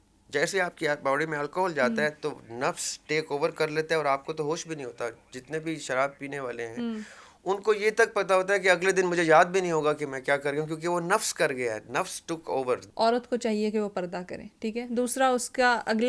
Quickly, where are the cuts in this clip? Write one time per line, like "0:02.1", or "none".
0:12.9